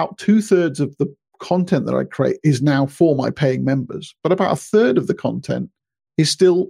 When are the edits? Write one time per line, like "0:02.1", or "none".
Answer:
none